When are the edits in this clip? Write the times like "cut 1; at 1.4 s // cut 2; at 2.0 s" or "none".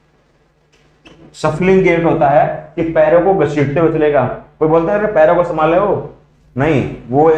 none